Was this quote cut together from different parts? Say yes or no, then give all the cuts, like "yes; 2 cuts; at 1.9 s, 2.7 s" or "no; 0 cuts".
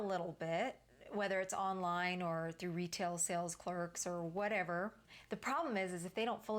yes; 1 cut; at 5.1 s